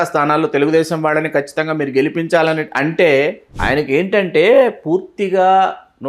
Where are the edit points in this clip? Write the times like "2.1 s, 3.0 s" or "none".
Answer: 3.5 s